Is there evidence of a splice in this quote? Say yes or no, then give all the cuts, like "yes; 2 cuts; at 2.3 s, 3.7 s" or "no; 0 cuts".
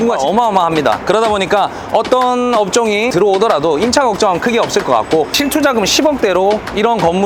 no; 0 cuts